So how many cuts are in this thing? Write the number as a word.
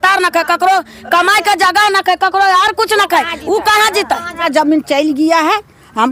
one